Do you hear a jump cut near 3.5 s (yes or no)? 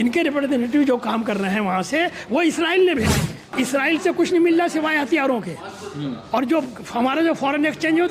yes